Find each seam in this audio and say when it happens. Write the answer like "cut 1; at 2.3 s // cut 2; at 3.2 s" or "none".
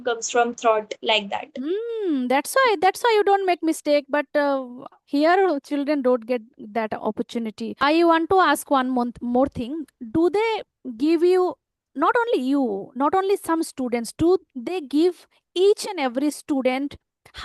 cut 1; at 7.8 s